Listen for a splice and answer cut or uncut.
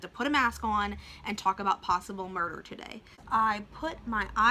cut